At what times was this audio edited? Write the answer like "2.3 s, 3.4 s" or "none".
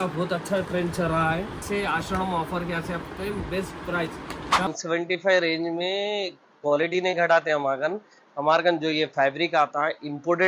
1.6 s, 4.7 s